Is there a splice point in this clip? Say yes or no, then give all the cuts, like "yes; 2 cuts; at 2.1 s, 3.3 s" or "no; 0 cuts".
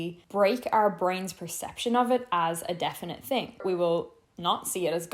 yes; 1 cut; at 3.6 s